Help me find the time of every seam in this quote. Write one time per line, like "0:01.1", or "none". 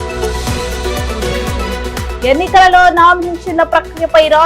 0:02.1